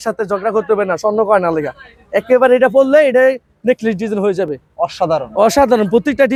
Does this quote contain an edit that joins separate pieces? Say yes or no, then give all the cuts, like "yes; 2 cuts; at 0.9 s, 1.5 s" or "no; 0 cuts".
no; 0 cuts